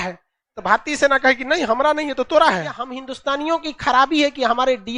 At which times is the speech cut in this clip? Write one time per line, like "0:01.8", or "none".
0:03.1

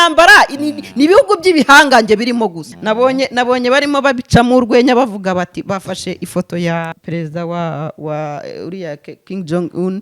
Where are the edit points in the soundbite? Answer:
0:02.7
0:07.0

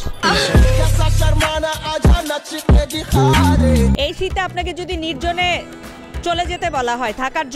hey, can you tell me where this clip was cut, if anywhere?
0:04.0

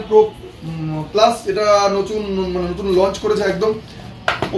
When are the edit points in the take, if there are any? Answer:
none

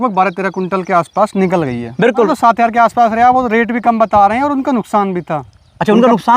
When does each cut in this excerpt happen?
0:02.3

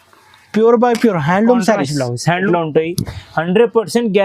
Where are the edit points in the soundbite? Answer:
0:02.4

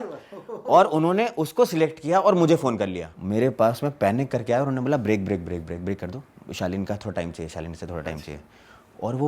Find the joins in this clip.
0:03.1

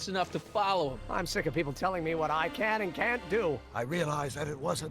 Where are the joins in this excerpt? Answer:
0:01.0
0:03.7

